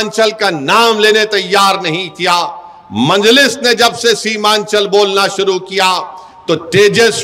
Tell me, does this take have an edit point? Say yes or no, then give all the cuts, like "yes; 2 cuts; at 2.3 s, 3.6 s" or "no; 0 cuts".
no; 0 cuts